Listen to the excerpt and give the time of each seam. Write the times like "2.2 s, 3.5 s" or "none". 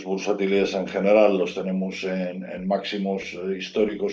none